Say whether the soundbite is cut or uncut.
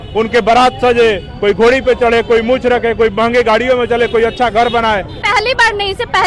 cut